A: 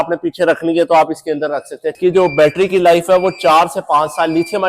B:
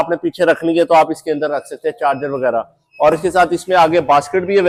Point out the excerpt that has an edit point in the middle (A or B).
A